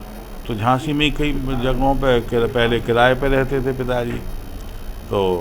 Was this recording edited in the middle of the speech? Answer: no; 0 cuts

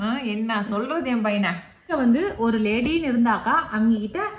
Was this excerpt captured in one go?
no; 1 cut; at 1.9 s

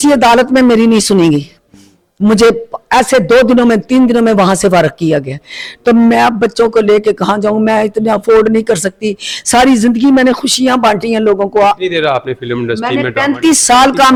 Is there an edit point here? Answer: no; 0 cuts

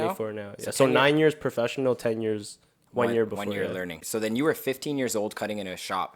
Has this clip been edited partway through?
yes; 1 cut; at 4.0 s

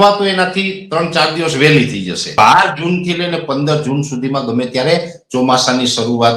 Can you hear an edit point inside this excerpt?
yes; 1 cut; at 2.4 s

